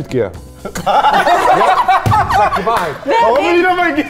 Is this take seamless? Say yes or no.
yes